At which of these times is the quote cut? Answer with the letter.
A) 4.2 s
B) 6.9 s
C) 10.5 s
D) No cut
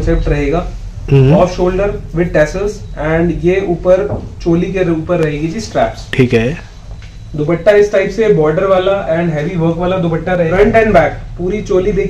C